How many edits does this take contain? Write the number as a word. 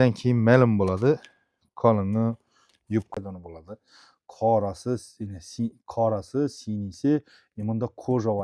one